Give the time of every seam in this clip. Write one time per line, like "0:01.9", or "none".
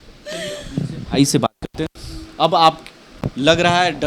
none